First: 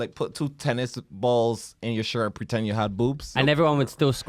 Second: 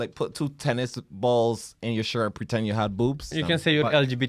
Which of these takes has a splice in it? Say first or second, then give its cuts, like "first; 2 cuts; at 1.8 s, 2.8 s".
second; 1 cut; at 3.3 s